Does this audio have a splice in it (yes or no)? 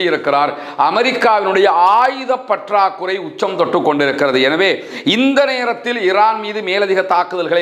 no